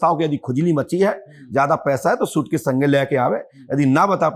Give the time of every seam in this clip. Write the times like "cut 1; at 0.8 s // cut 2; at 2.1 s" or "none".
none